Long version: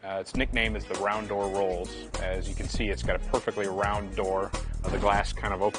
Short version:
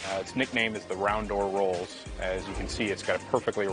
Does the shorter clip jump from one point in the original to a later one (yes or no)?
no